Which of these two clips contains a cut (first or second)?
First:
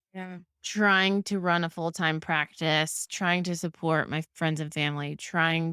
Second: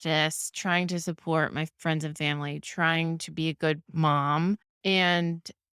second